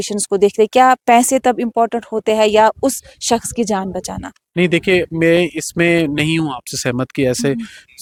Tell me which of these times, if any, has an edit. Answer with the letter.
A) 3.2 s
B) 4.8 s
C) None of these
C